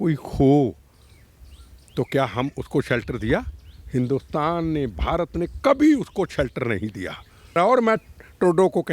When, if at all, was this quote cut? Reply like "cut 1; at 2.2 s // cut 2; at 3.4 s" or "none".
cut 1; at 7.6 s